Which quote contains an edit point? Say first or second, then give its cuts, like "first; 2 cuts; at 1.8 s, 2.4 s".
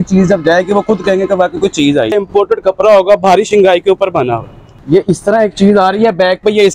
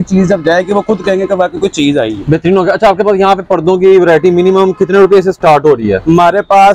first; 2 cuts; at 2.1 s, 4.6 s